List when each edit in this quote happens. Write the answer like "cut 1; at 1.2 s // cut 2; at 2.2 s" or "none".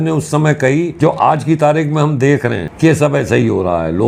cut 1; at 0.9 s // cut 2; at 2.7 s

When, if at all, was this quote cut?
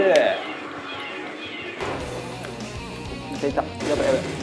cut 1; at 1.8 s

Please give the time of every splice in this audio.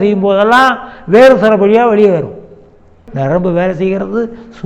cut 1; at 3.0 s

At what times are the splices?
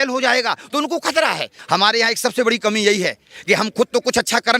cut 1; at 1.6 s

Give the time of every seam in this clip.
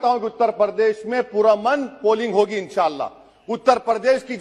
none

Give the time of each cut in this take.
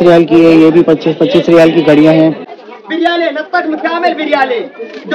cut 1; at 2.4 s

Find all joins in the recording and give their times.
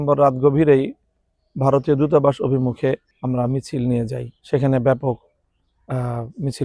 none

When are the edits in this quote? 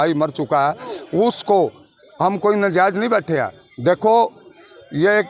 none

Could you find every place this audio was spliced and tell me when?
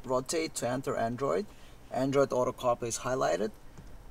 none

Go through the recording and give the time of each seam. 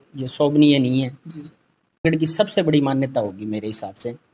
cut 1; at 2.0 s

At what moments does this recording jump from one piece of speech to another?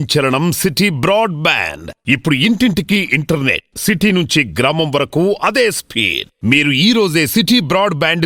none

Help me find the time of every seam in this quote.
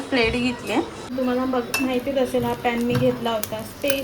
cut 1; at 1.1 s

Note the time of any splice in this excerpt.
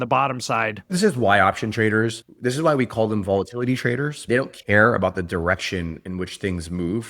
cut 1; at 0.9 s // cut 2; at 2.3 s // cut 3; at 4.2 s

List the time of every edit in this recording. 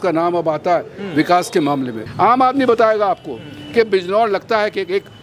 cut 1; at 2.0 s

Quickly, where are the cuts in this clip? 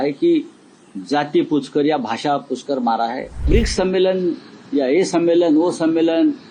cut 1; at 3.5 s

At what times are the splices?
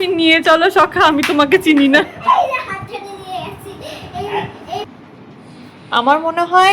cut 1; at 4.9 s

